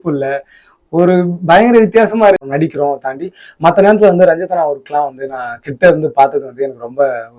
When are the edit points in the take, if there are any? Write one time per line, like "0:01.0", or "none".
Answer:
0:02.5

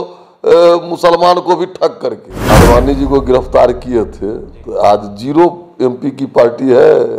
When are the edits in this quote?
0:02.5

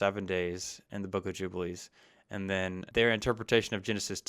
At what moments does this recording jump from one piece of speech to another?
0:02.8

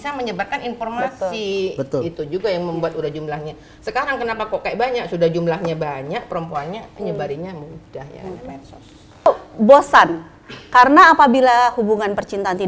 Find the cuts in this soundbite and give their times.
0:09.3

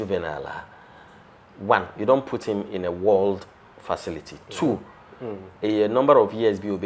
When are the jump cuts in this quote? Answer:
none

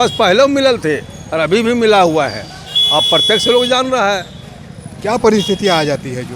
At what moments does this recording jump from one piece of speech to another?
none

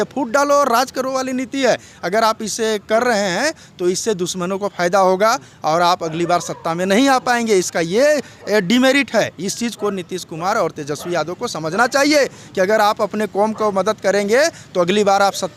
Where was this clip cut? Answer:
none

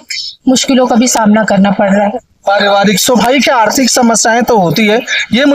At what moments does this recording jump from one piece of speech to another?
none

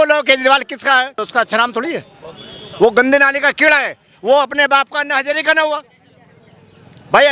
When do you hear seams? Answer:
0:01.2

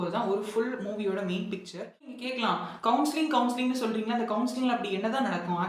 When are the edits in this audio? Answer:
0:02.2

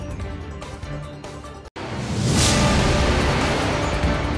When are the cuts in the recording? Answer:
0:01.7

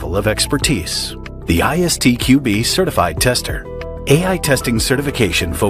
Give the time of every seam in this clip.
0:03.9

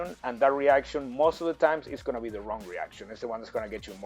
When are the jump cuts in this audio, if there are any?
none

